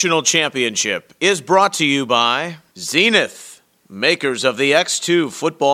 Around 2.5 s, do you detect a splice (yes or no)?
yes